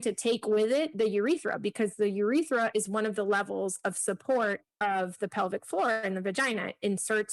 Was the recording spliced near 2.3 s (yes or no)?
no